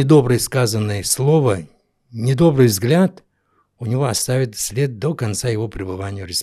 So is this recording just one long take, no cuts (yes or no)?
yes